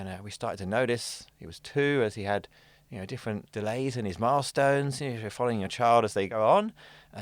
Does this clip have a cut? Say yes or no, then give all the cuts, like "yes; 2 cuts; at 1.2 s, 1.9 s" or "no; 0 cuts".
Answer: yes; 2 cuts; at 3.5 s, 6.3 s